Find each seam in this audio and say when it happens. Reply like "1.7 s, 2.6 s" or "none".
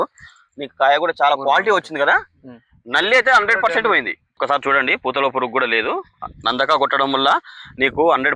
4.3 s